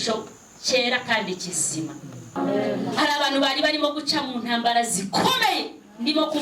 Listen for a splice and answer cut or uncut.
cut